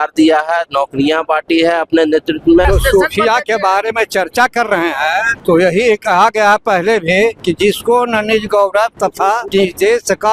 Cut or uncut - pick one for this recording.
cut